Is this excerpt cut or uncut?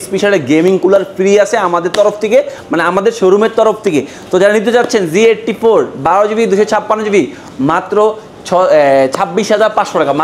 uncut